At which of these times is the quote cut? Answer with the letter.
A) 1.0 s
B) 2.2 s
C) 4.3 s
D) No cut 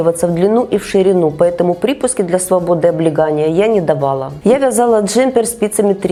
D